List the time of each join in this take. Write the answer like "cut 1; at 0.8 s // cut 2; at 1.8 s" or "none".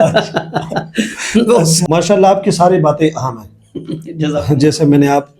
cut 1; at 1.8 s